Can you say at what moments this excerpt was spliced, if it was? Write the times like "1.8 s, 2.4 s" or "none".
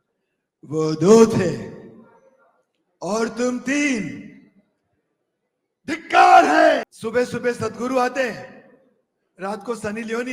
6.9 s